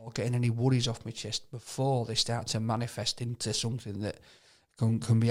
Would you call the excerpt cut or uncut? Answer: uncut